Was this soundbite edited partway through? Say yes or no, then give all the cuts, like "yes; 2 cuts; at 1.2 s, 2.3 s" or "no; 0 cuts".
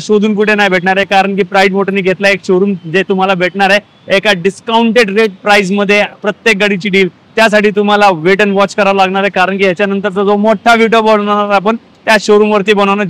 no; 0 cuts